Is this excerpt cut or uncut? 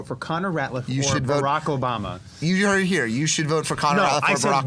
uncut